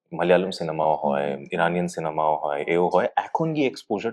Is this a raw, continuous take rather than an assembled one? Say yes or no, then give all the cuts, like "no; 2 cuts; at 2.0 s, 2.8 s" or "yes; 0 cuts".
yes; 0 cuts